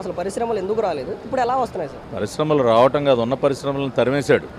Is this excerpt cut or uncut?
uncut